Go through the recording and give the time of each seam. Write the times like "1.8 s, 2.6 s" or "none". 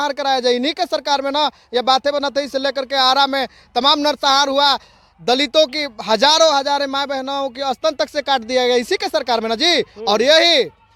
none